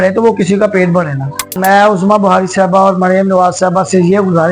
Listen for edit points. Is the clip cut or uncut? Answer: cut